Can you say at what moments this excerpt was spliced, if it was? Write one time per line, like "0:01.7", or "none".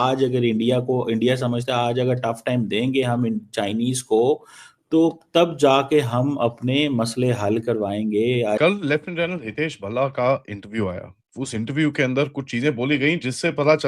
0:08.6